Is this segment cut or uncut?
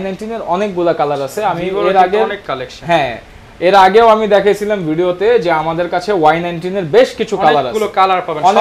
uncut